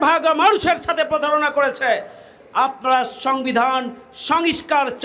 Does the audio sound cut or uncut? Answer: cut